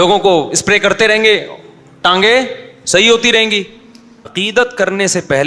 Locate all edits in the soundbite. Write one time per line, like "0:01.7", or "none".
0:04.3